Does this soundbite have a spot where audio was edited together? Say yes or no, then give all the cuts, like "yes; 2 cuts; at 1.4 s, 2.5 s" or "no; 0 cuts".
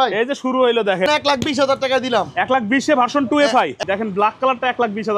yes; 2 cuts; at 1.1 s, 3.7 s